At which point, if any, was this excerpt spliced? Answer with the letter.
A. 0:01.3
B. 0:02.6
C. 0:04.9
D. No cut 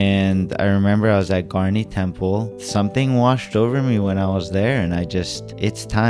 B